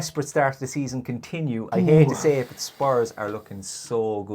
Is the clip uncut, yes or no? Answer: no